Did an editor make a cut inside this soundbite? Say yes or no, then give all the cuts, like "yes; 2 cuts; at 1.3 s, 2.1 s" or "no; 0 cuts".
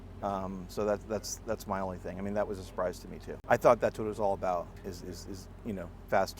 yes; 1 cut; at 3.3 s